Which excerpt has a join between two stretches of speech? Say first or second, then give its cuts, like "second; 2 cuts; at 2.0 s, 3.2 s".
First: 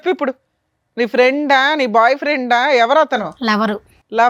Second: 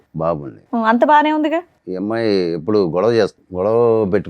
second; 2 cuts; at 1.8 s, 3.4 s